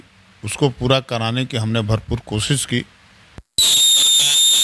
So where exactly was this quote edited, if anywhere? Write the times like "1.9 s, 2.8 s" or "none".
none